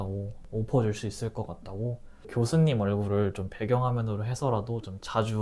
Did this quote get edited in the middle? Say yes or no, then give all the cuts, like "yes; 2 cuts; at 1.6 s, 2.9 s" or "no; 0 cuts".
yes; 1 cut; at 2.2 s